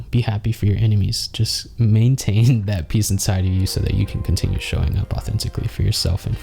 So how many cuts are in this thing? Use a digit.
0